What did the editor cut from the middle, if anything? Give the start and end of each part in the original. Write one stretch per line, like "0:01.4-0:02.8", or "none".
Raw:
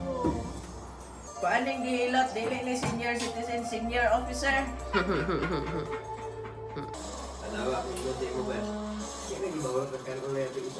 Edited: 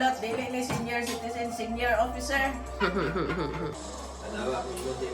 0:05.9-0:06.9